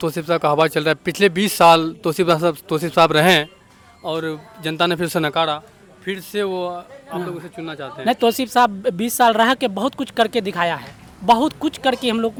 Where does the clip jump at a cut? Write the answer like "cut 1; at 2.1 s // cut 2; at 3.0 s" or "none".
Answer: none

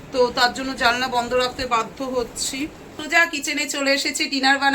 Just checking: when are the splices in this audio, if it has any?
cut 1; at 3.0 s

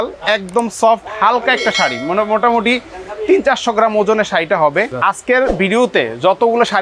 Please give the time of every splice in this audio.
cut 1; at 4.9 s

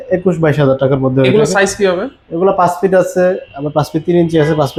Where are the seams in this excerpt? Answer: none

